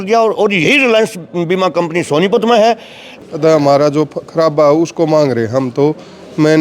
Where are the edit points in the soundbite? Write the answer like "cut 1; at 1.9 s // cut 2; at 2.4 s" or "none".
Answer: cut 1; at 3.1 s